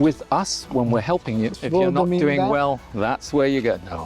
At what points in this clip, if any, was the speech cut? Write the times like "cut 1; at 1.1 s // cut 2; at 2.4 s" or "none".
cut 1; at 1.6 s